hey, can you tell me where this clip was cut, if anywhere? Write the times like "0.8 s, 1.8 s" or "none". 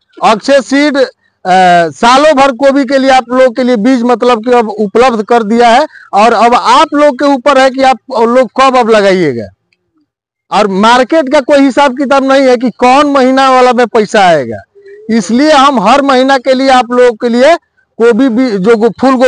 none